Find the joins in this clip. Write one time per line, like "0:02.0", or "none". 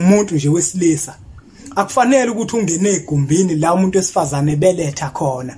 none